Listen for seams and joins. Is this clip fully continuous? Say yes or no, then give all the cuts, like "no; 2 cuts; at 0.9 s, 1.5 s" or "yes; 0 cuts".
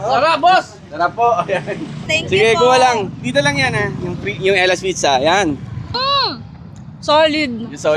no; 2 cuts; at 2.1 s, 6.0 s